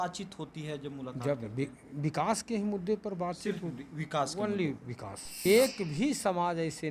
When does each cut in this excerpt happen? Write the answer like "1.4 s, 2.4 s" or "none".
5.4 s